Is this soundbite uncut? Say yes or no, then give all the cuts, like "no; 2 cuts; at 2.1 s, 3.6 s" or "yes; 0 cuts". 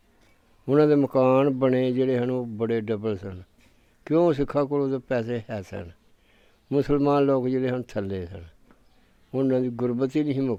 yes; 0 cuts